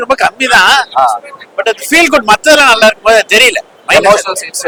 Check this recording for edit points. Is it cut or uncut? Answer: uncut